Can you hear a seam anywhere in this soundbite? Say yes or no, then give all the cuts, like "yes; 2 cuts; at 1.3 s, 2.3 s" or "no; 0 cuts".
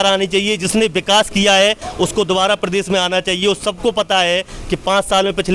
no; 0 cuts